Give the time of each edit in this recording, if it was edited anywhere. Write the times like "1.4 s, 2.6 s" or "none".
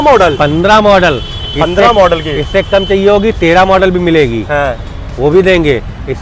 none